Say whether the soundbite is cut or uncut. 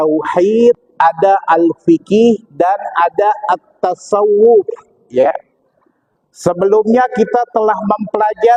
uncut